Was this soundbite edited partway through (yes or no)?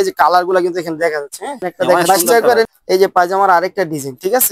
yes